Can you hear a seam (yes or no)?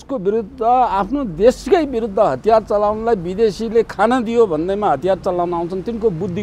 no